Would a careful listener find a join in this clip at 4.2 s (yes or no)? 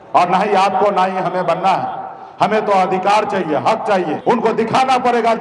yes